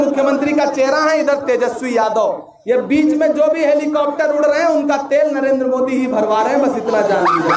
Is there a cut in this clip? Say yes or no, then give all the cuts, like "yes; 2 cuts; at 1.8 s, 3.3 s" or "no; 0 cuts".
no; 0 cuts